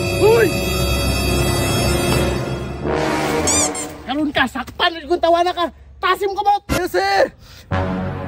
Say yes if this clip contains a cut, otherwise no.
yes